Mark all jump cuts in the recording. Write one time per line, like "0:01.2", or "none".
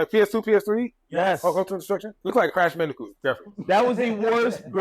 0:02.2